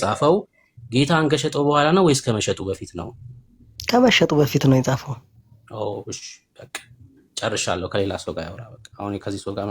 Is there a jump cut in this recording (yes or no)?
no